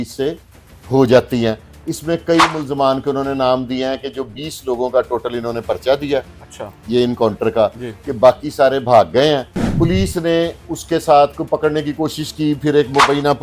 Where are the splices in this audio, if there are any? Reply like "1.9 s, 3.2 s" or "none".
9.6 s